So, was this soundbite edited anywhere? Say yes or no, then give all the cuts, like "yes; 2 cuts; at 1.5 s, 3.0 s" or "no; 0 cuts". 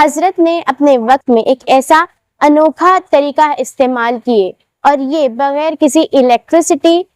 no; 0 cuts